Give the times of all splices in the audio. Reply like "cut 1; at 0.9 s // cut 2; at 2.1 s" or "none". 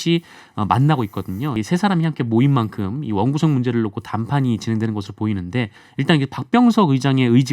cut 1; at 1.5 s // cut 2; at 5.8 s